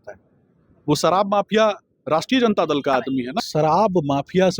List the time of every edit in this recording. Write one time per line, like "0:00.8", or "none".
0:03.4